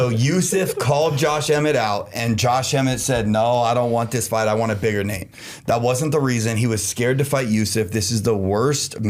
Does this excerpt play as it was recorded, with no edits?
yes; 0 cuts

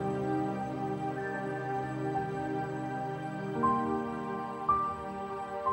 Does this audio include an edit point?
no; 0 cuts

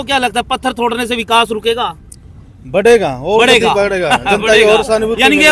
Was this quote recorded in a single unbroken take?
yes; 0 cuts

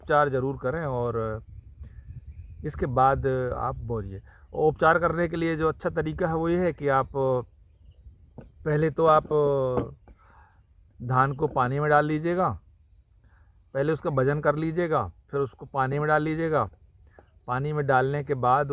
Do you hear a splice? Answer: no; 0 cuts

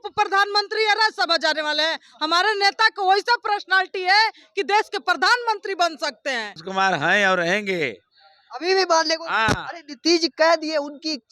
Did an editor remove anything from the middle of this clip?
yes; 1 cut; at 6.6 s

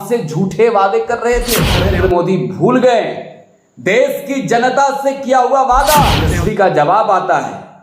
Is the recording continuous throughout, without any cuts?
no; 2 cuts; at 1.9 s, 6.3 s

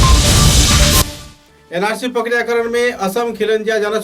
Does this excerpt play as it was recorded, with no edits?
no; 1 cut; at 1.0 s

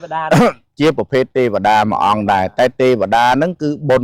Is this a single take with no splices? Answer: yes; 0 cuts

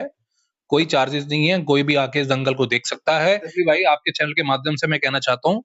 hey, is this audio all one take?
no; 1 cut; at 3.5 s

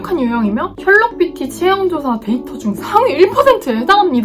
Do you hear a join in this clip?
no; 0 cuts

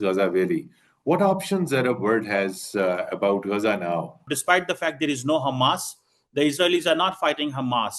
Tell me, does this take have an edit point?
yes; 1 cut; at 4.3 s

